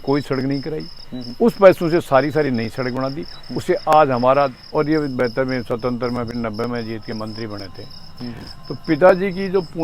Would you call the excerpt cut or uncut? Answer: cut